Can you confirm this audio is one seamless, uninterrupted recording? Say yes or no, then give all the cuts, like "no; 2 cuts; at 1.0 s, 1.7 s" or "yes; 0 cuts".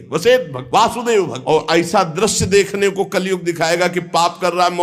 no; 1 cut; at 1.1 s